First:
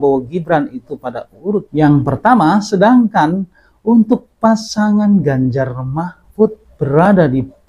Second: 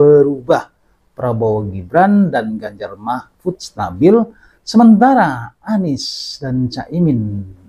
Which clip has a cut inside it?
first; 1 cut; at 6.7 s

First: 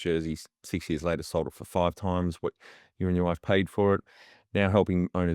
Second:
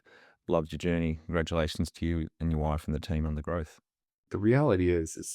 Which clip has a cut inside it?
second; 1 cut; at 4.3 s

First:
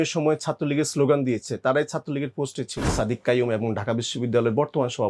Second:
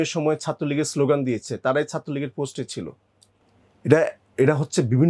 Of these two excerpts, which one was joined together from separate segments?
first; 1 cut; at 2.9 s

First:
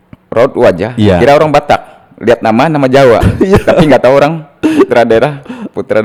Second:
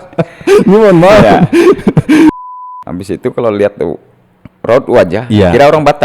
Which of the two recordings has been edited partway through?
second; 1 cut; at 2.3 s

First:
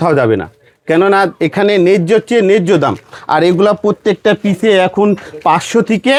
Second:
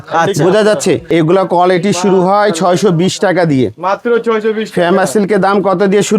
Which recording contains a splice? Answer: second; 1 cut; at 1.0 s

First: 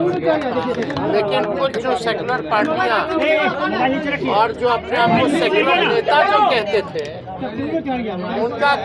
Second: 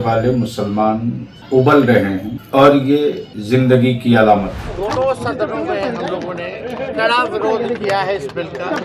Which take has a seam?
second; 4 cuts; at 1.3 s, 2.3 s, 3.3 s, 4.6 s

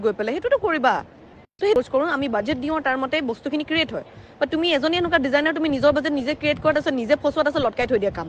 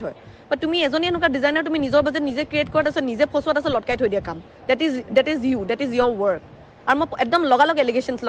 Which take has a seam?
first; 1 cut; at 1.8 s

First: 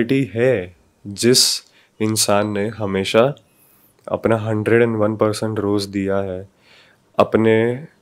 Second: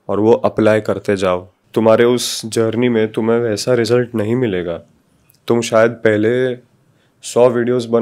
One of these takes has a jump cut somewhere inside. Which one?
second; 1 cut; at 1.5 s

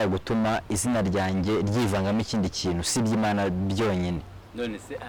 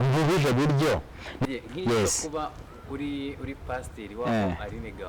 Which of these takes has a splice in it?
second; 1 cut; at 1.5 s

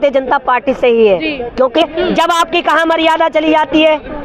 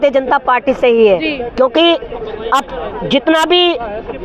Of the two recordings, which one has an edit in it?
first; 1 cut; at 1.8 s

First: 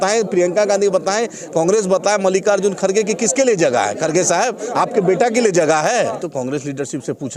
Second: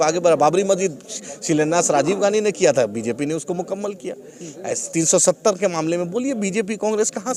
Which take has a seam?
first; 1 cut; at 6.2 s

